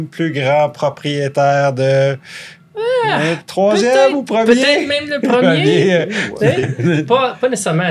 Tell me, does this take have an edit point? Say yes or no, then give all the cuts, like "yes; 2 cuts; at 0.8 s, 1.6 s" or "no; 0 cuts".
no; 0 cuts